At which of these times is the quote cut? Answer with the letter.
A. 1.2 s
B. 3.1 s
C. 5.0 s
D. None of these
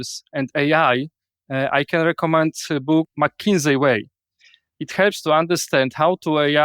B